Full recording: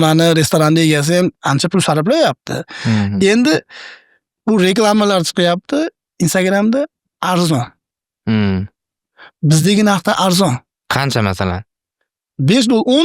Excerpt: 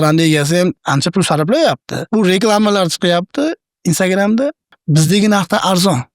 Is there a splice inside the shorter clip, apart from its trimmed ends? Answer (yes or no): yes